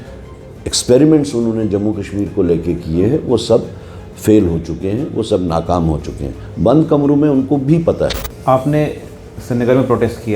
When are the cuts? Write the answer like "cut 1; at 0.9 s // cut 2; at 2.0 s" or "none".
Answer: cut 1; at 8.3 s